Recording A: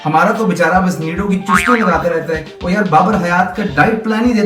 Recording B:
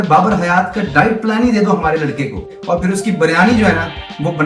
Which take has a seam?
B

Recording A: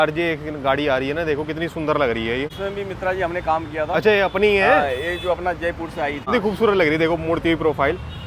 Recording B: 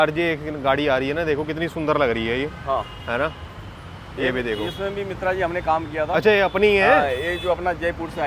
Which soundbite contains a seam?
A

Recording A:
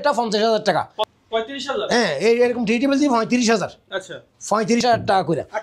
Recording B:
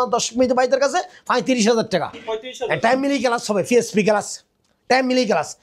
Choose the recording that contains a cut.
A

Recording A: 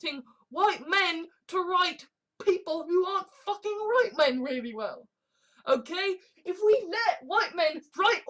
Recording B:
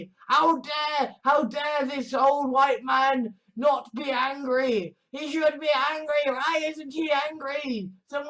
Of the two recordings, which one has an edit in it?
A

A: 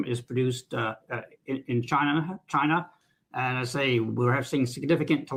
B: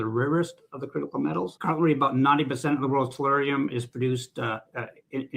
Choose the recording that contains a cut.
B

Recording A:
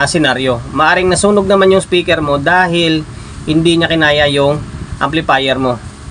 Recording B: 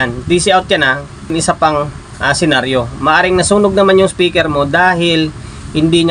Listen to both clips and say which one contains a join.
B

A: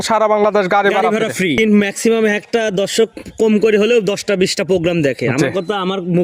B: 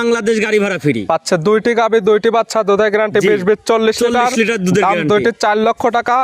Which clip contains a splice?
A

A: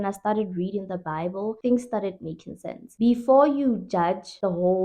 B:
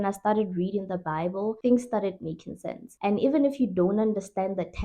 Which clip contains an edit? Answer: A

